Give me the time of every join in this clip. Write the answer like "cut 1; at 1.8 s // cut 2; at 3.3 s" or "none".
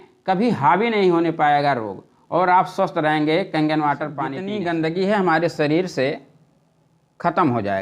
cut 1; at 4.5 s